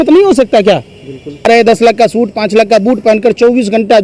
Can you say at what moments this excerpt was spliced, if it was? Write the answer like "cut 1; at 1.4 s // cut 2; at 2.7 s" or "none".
cut 1; at 1.4 s